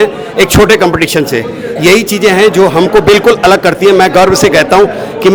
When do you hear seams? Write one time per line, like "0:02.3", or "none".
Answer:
none